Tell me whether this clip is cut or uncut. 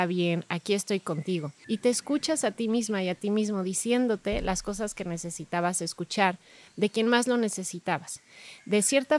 cut